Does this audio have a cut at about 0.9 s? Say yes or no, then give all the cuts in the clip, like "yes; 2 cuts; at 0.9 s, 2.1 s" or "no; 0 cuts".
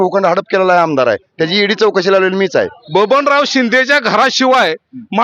no; 1 cut; at 2.8 s